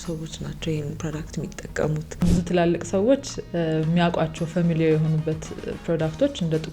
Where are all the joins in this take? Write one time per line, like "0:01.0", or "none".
0:02.2